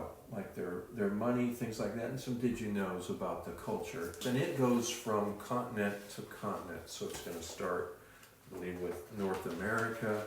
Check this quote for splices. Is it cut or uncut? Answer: cut